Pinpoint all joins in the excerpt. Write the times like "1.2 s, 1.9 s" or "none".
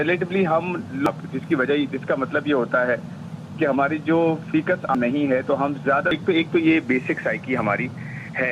1.1 s, 4.9 s, 6.2 s